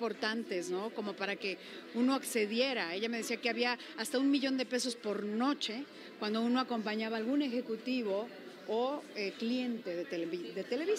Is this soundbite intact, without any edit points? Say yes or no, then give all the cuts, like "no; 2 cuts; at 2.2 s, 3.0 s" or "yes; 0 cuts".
yes; 0 cuts